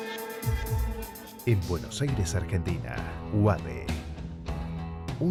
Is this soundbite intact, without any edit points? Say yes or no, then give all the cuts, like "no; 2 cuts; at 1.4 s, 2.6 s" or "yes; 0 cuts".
yes; 0 cuts